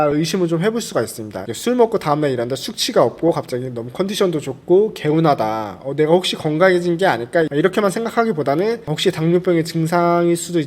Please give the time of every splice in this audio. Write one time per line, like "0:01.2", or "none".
0:01.5